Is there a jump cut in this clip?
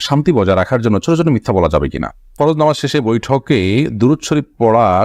yes; 1 cut; at 2.2 s

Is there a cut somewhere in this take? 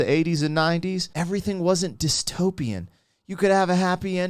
yes; 1 cut; at 1.1 s

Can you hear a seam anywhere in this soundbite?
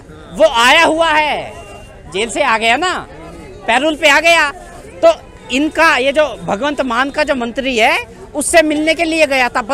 no; 0 cuts

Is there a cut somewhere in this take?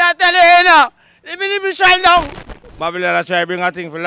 yes; 1 cut; at 2.3 s

